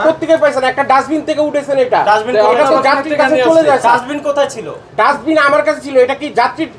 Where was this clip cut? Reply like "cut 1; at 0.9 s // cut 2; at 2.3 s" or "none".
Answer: none